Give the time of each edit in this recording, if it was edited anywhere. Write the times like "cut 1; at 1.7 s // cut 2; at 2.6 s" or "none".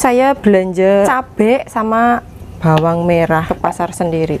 cut 1; at 1.1 s // cut 2; at 3.5 s